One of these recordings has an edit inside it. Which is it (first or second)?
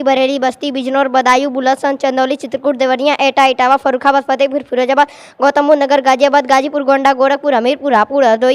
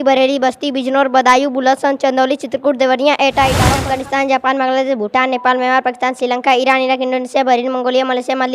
second